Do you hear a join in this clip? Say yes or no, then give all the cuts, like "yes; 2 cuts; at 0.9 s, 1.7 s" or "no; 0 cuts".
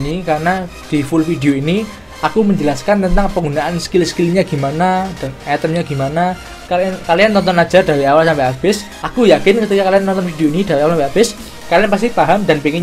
no; 0 cuts